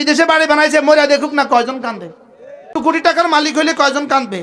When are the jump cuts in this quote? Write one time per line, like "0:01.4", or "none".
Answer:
0:02.7